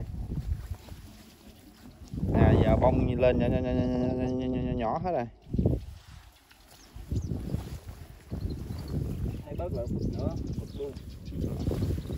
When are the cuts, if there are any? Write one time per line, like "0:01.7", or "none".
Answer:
none